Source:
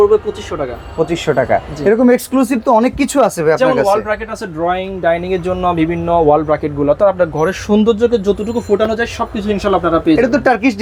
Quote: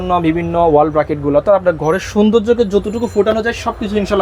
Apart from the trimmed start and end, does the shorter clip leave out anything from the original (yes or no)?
no